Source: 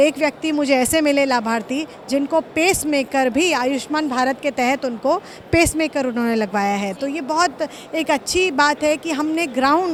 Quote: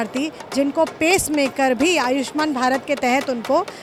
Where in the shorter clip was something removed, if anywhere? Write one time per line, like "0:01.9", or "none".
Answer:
none